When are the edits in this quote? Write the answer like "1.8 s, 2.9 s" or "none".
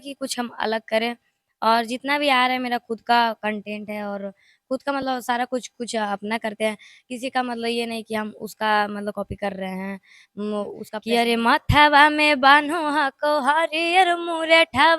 10.9 s

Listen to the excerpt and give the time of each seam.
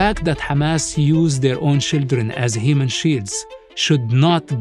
none

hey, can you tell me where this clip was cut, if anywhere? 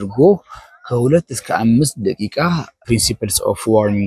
2.8 s

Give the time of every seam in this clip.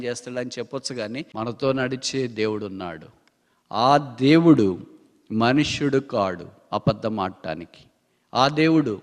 1.3 s

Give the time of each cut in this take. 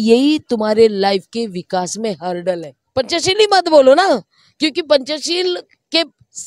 2.8 s

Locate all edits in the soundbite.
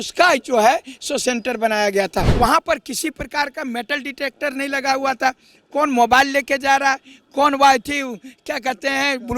2.3 s

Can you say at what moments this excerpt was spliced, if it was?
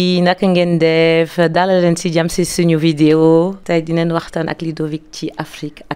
3.6 s

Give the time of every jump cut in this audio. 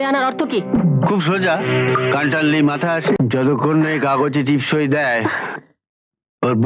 3.2 s

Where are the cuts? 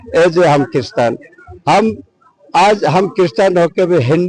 none

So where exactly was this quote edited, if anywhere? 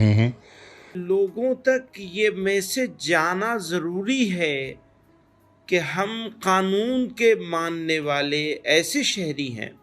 1.0 s

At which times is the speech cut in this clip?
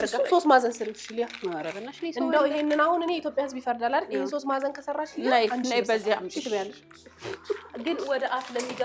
none

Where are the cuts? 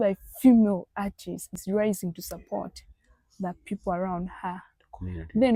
none

